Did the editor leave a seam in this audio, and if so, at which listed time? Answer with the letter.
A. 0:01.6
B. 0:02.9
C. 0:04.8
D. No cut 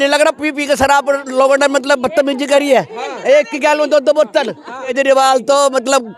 C